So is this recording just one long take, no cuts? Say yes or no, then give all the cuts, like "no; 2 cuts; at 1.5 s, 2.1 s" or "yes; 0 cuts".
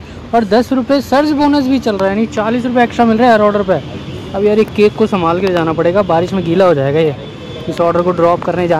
yes; 0 cuts